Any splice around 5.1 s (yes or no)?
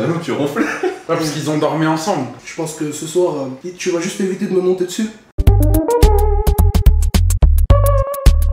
no